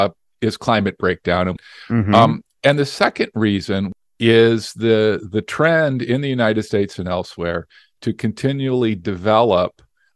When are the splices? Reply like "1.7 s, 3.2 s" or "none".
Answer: 1.6 s, 3.9 s